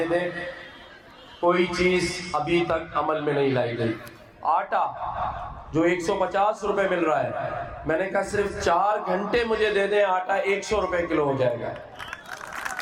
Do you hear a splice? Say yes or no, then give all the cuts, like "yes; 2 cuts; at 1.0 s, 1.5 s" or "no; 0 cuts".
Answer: no; 0 cuts